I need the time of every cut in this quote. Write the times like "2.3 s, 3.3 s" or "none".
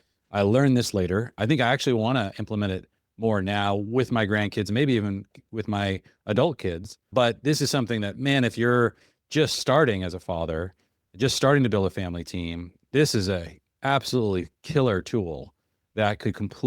1.4 s, 7.1 s